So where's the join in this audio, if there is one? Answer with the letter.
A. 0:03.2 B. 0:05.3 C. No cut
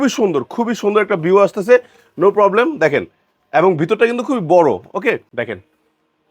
B